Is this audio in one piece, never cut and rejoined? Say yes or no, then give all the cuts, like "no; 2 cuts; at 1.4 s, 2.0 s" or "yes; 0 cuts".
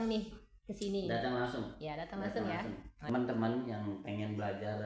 no; 1 cut; at 3.1 s